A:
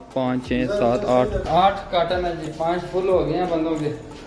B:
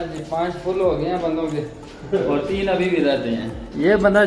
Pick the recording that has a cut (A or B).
A